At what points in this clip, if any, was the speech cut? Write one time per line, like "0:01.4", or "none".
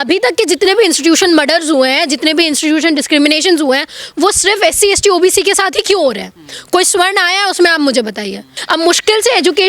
0:08.6